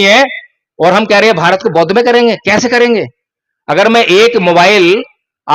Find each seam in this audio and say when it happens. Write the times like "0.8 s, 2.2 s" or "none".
none